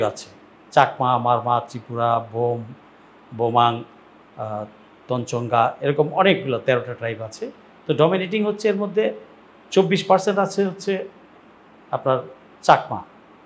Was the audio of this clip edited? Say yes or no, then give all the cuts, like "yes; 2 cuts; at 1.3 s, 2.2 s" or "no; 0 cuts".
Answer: no; 0 cuts